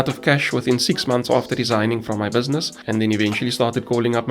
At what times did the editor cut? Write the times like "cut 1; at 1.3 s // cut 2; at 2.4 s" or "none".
cut 1; at 2.7 s